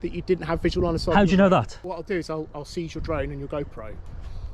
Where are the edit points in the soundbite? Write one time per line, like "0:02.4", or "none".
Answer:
0:01.8